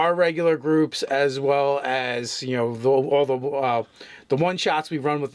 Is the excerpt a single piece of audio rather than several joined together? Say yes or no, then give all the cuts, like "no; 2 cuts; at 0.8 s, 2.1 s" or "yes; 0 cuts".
no; 1 cut; at 2.7 s